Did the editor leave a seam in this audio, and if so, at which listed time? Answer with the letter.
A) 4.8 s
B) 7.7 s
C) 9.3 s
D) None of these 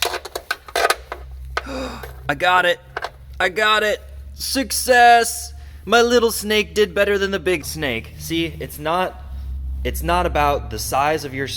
B